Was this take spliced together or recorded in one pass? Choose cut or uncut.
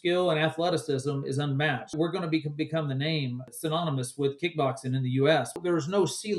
cut